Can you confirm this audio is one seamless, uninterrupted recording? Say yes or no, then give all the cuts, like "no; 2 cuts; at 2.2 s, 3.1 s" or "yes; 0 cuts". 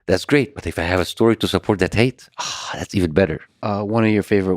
no; 1 cut; at 3.4 s